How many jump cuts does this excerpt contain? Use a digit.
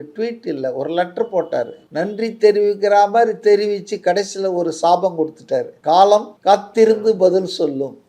3